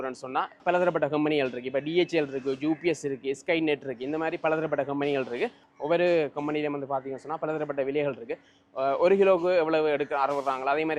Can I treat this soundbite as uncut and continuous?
yes; 0 cuts

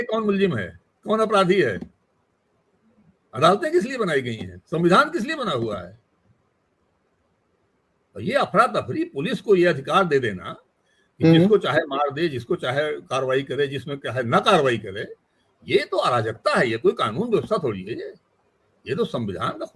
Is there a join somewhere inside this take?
no; 0 cuts

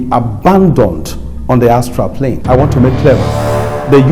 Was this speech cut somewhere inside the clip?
yes; 1 cut; at 2.4 s

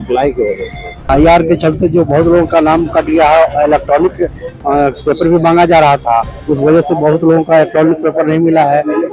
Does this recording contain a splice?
yes; 1 cut; at 1.0 s

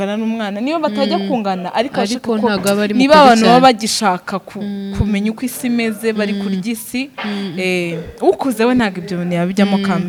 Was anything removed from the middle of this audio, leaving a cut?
no; 0 cuts

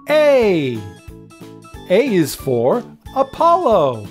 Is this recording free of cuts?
yes; 0 cuts

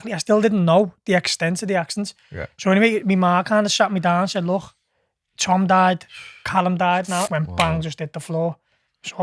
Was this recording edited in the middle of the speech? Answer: yes; 1 cut; at 7.3 s

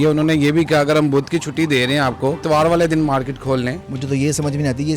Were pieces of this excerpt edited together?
yes; 2 cuts; at 2.4 s, 3.9 s

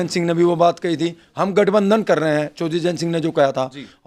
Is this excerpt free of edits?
yes; 0 cuts

